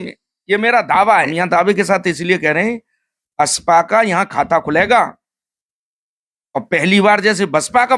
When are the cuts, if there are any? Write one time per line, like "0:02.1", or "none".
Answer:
0:01.3